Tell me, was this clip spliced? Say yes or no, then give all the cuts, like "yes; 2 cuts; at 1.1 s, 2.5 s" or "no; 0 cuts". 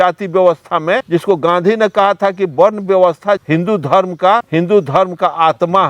yes; 3 cuts; at 1.0 s, 3.4 s, 4.5 s